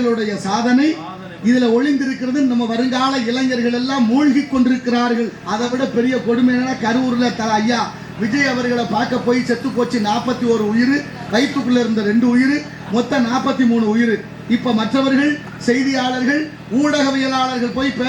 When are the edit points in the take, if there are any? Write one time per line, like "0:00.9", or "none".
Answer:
0:05.4